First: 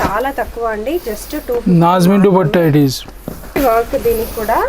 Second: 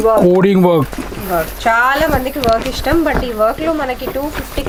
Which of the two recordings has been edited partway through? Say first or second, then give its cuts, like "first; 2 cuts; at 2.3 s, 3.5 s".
first; 1 cut; at 3.6 s